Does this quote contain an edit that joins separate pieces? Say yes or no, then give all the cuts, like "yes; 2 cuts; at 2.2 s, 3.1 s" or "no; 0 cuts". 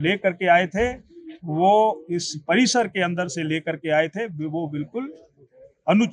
no; 0 cuts